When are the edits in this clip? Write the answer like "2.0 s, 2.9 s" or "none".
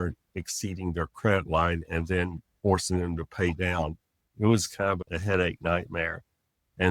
none